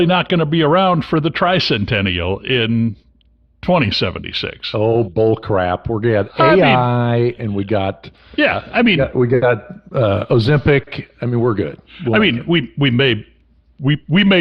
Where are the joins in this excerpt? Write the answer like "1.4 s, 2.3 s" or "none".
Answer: none